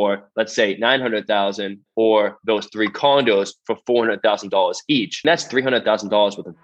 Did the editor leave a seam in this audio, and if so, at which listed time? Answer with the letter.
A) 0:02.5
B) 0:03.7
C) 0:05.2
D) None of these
C